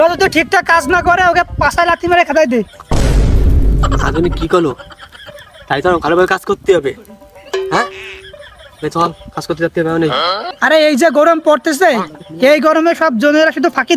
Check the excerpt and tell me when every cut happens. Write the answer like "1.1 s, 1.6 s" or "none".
none